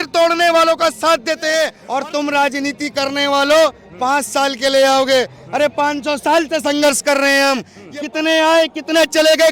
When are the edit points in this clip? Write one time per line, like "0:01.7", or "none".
0:01.8
0:07.8